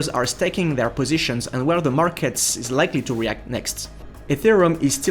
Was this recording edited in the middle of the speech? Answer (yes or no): yes